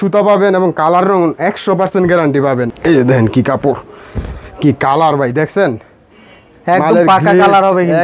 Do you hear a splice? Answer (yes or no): no